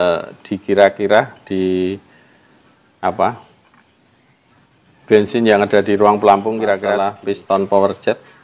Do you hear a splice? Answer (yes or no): yes